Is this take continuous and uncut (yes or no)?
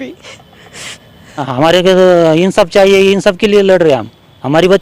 no